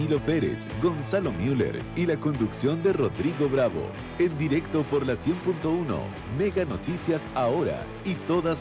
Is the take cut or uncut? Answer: uncut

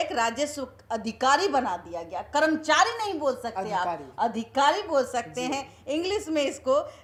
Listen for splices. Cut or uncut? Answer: uncut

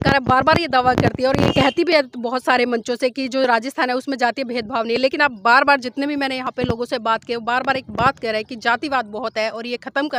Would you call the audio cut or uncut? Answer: uncut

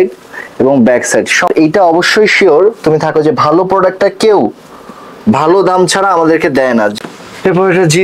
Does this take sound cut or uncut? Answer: cut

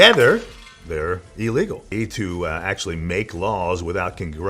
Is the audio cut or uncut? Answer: cut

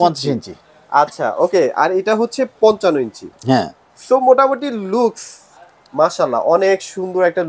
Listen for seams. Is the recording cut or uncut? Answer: uncut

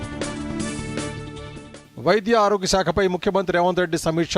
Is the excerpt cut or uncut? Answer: cut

